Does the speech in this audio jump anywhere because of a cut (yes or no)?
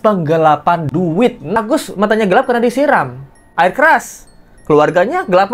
yes